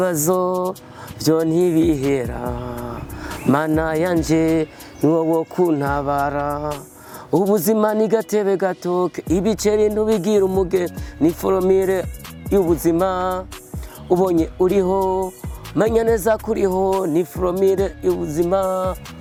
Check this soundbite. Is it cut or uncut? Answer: uncut